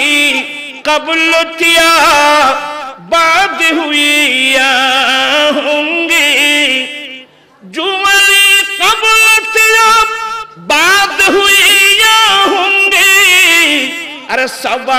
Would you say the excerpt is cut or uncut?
uncut